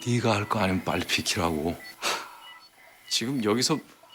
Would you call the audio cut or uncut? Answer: uncut